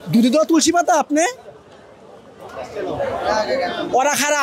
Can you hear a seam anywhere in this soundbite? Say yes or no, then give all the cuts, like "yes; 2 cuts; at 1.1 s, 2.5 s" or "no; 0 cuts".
no; 0 cuts